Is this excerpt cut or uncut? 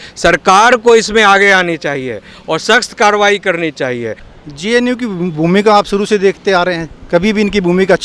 cut